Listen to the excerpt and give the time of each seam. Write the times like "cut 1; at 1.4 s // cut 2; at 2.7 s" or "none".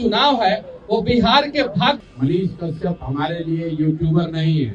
cut 1; at 2.0 s